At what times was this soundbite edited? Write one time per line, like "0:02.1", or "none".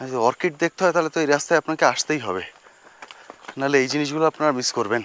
none